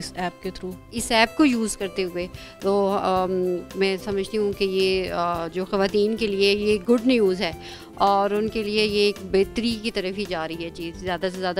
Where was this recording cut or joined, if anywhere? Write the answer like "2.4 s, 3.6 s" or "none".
1.0 s